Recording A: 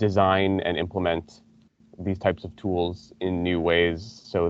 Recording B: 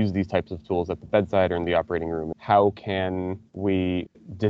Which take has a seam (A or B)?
B